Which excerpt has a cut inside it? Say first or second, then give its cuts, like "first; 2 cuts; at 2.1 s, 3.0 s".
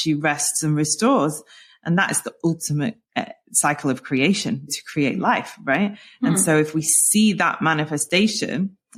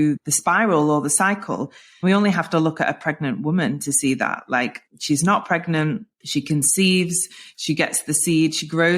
second; 2 cuts; at 4.9 s, 6.1 s